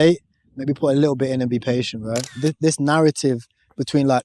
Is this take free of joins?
no; 1 cut; at 2.4 s

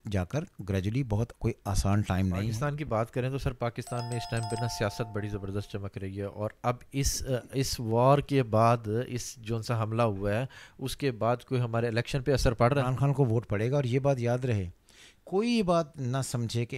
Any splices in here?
yes; 2 cuts; at 2.5 s, 12.9 s

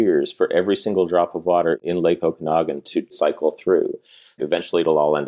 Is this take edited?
yes; 3 cuts; at 1.8 s, 3.2 s, 4.4 s

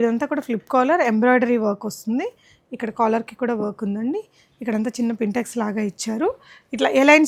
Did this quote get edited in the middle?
no; 0 cuts

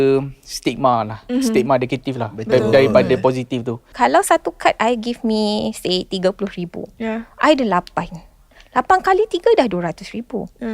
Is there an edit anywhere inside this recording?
yes; 1 cut; at 3.9 s

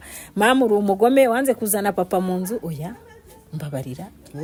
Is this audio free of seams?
yes; 0 cuts

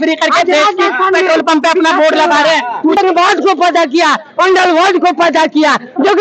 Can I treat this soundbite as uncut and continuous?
no; 1 cut; at 3.0 s

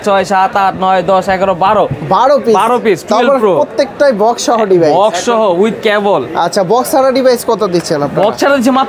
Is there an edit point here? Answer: no; 0 cuts

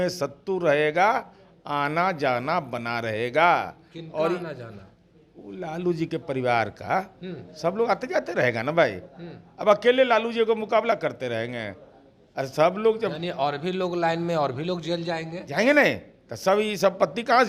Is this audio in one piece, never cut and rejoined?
yes; 0 cuts

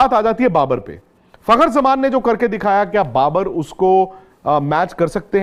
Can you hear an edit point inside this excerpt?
no; 0 cuts

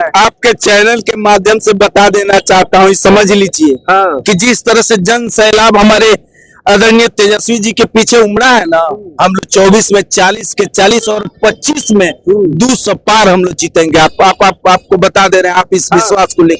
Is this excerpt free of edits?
yes; 0 cuts

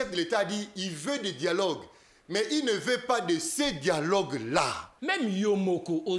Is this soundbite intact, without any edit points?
no; 1 cut; at 4.9 s

